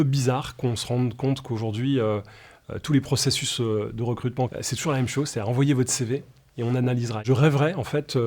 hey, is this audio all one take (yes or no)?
no